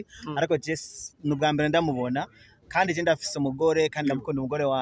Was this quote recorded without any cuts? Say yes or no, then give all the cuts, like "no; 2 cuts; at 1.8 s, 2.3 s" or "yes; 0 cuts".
yes; 0 cuts